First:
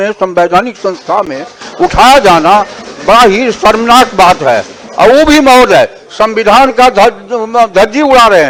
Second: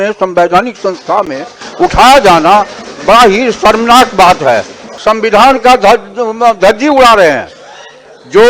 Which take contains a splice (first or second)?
second